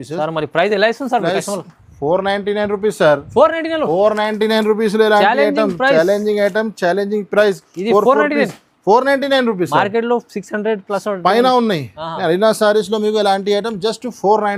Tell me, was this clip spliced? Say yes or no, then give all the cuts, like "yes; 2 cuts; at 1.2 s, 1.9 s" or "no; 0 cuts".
no; 0 cuts